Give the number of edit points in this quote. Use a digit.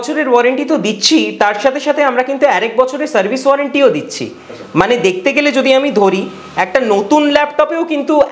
0